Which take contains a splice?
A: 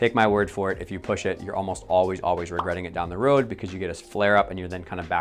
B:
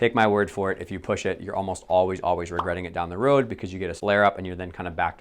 B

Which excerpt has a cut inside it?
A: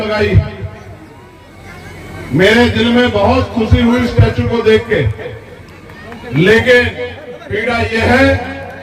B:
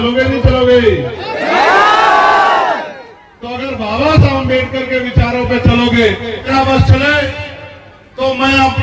B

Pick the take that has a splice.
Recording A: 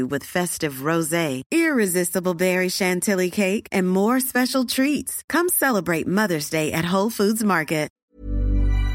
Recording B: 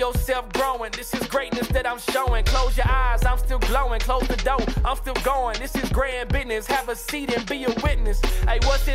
A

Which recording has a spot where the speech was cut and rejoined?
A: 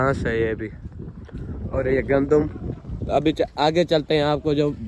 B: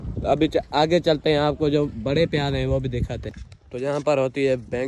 B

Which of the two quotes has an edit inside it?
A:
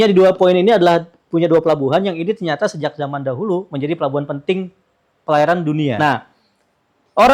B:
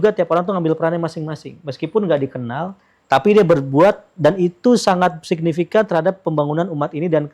A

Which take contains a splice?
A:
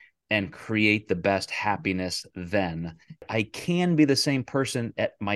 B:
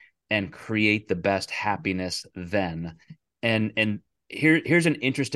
A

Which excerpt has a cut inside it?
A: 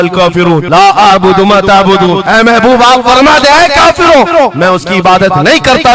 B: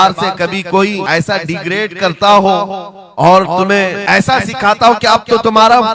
B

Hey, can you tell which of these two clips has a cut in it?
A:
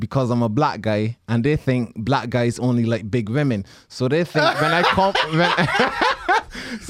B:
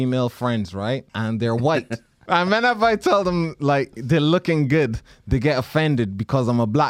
B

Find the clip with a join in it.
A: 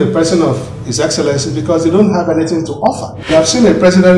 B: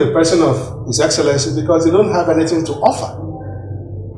A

